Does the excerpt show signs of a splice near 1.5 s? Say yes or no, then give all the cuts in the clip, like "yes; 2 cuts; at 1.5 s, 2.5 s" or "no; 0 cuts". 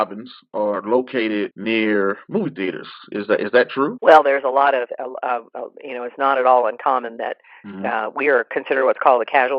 yes; 2 cuts; at 1.5 s, 4.0 s